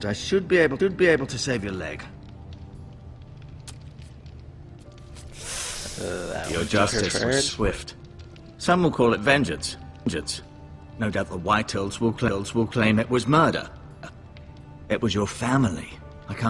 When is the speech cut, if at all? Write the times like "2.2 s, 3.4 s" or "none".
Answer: 3.8 s